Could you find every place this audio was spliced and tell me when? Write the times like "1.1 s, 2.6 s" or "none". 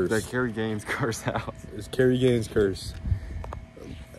none

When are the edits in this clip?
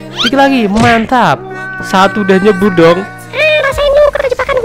3.2 s

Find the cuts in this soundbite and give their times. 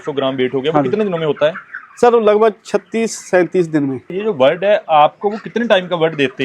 4.1 s

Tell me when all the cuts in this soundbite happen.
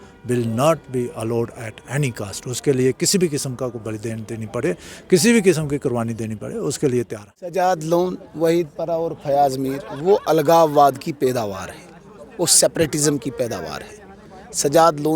7.5 s

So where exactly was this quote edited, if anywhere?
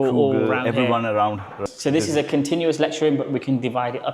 1.6 s

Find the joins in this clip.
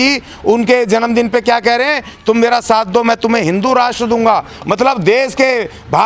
none

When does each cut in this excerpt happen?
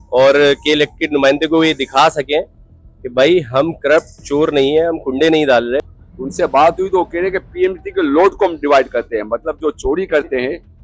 5.8 s

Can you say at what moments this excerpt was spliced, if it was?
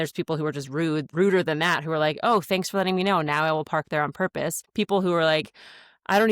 1.1 s, 4.6 s

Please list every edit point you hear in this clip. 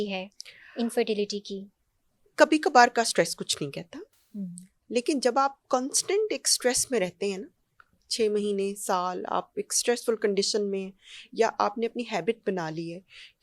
none

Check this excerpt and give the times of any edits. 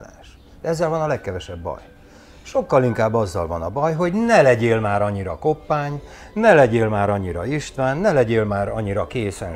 none

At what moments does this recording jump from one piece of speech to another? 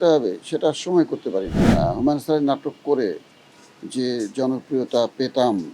1.6 s

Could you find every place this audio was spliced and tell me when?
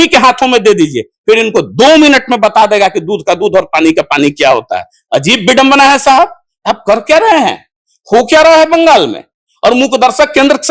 none

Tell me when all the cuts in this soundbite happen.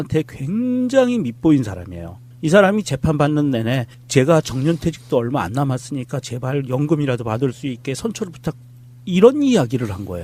3.4 s

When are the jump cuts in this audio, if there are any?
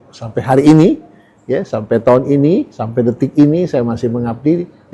none

